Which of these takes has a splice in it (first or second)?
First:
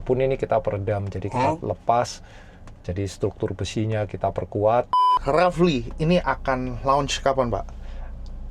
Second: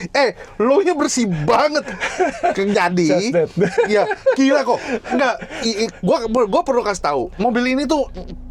first